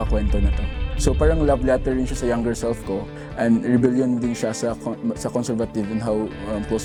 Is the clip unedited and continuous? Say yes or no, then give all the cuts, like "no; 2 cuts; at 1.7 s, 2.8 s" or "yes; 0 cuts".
yes; 0 cuts